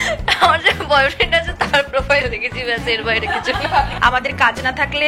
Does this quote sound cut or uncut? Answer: cut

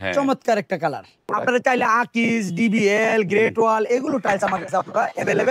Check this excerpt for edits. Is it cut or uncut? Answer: cut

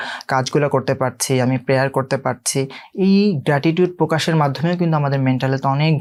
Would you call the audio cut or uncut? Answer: uncut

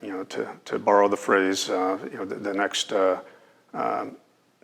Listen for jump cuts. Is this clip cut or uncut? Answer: uncut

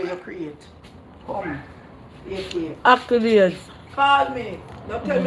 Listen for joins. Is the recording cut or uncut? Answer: uncut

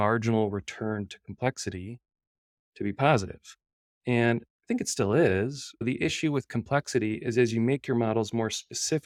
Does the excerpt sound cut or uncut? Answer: uncut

